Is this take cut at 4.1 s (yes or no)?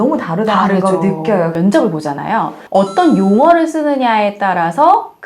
no